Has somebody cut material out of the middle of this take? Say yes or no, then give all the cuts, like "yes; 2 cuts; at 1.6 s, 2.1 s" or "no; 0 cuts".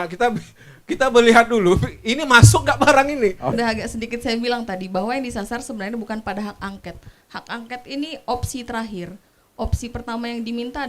yes; 1 cut; at 3.6 s